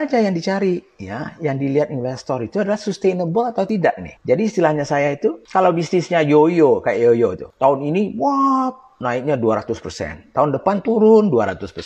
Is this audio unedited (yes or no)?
no